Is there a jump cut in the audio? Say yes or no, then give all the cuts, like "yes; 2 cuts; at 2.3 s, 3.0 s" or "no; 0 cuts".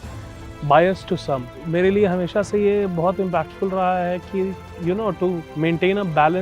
yes; 3 cuts; at 1.6 s, 4.7 s, 5.5 s